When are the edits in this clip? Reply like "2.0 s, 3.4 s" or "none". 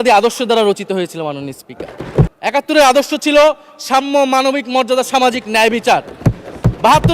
2.0 s